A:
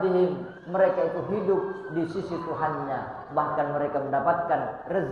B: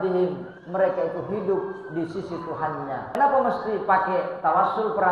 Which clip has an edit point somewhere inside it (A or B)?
B